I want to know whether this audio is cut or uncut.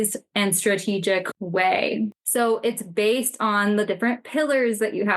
cut